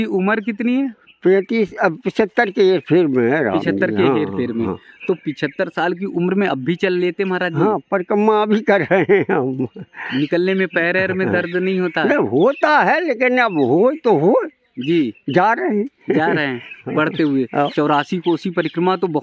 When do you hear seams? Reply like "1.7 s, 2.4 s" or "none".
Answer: none